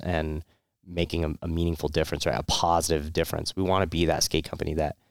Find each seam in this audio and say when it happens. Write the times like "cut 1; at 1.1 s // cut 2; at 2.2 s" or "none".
none